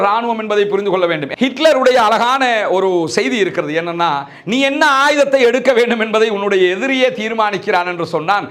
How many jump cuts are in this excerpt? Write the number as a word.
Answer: one